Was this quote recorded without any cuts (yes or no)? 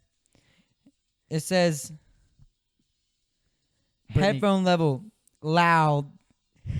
yes